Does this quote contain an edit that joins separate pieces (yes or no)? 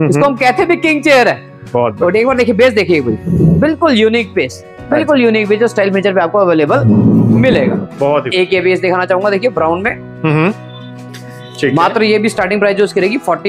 no